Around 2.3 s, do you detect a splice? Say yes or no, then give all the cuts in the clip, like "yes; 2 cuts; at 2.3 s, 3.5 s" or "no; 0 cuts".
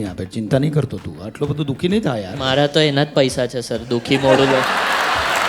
yes; 1 cut; at 2.3 s